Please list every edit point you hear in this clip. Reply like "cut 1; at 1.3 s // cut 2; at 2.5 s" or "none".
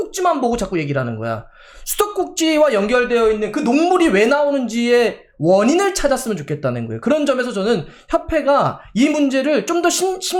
none